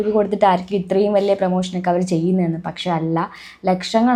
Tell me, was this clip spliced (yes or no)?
no